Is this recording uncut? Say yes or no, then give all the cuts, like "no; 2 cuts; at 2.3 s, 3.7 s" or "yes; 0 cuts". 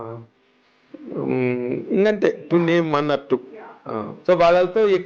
no; 1 cut; at 4.1 s